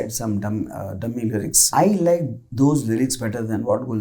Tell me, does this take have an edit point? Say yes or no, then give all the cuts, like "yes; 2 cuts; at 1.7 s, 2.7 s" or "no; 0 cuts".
yes; 1 cut; at 1.7 s